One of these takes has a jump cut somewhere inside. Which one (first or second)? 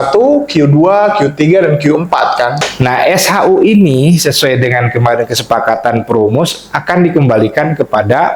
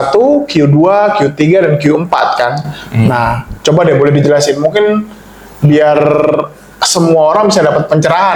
first